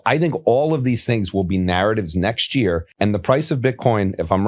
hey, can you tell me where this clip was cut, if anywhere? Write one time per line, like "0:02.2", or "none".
0:02.9